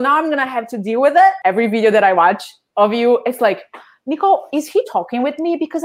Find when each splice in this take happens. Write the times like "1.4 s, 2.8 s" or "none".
1.4 s